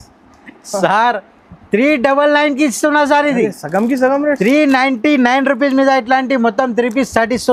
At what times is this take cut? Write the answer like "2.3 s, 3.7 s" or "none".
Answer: none